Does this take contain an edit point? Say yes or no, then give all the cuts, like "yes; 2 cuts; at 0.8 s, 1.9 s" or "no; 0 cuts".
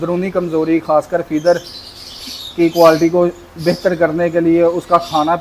no; 0 cuts